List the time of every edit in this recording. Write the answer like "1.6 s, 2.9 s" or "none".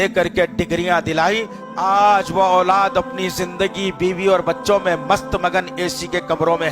1.6 s